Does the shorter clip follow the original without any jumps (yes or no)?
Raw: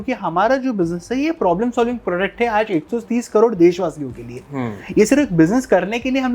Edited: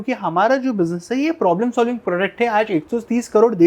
yes